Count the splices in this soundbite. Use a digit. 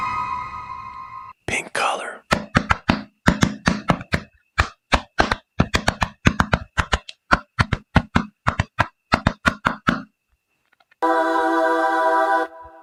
0